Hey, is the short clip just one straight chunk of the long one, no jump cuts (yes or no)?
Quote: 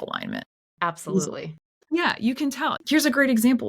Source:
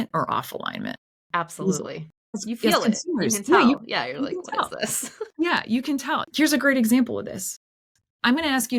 no